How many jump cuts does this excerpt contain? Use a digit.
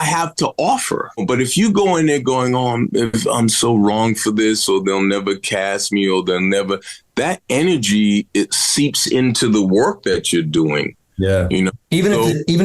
1